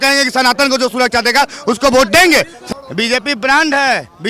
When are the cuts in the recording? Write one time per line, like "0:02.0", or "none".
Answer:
0:02.6